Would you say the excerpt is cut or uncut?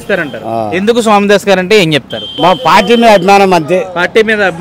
cut